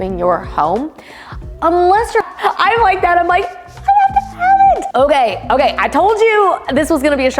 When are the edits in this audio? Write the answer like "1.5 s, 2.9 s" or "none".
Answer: 2.2 s, 4.8 s